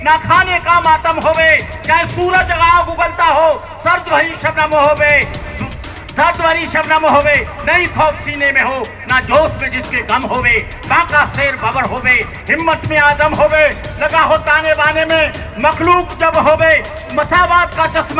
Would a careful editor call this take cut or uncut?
uncut